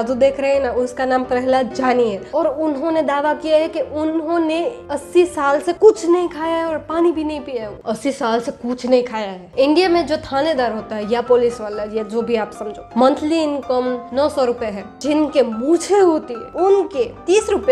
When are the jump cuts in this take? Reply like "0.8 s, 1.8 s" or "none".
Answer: 7.7 s, 9.5 s, 12.8 s, 15.0 s

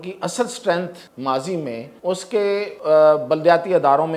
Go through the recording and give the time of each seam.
1.0 s, 1.9 s, 2.7 s

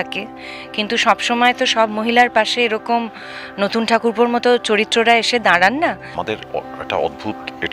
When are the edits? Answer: 6.1 s

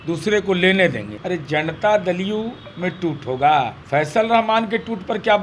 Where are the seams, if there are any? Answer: 1.1 s, 3.8 s

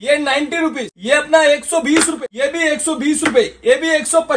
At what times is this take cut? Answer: 0.9 s, 2.1 s

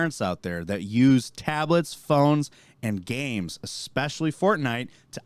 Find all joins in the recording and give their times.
none

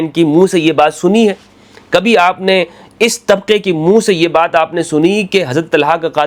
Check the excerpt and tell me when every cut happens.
none

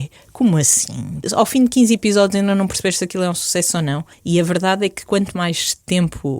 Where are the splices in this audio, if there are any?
1.3 s, 4.1 s

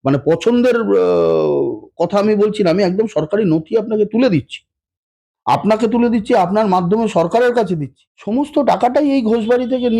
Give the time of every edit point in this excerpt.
8.4 s

